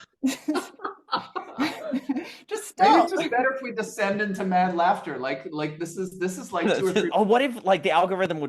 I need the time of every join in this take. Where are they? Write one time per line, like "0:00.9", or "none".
0:07.1